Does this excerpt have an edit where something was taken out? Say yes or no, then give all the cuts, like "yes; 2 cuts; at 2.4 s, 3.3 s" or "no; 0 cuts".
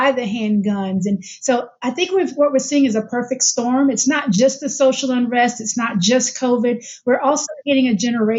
no; 0 cuts